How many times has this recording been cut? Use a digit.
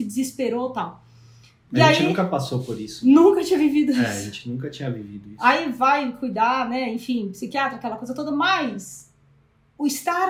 0